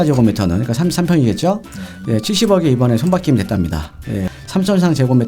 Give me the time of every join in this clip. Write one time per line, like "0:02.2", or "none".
0:04.3